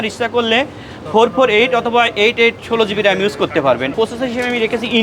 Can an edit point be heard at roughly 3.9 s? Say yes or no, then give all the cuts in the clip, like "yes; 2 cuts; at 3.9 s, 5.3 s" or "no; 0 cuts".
yes; 1 cut; at 3.9 s